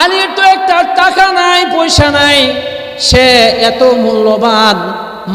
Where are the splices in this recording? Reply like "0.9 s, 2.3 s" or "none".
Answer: none